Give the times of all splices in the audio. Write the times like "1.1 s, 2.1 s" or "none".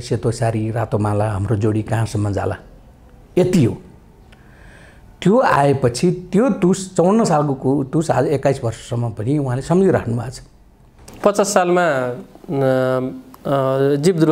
none